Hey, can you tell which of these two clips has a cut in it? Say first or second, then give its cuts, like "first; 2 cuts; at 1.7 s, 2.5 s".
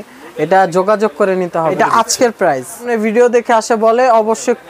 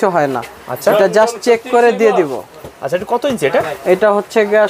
first; 2 cuts; at 1.7 s, 2.9 s